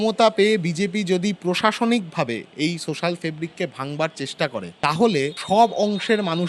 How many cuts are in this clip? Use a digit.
2